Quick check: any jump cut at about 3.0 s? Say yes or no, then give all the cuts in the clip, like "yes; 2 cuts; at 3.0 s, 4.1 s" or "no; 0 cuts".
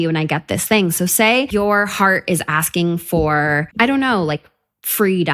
no; 1 cut; at 1.5 s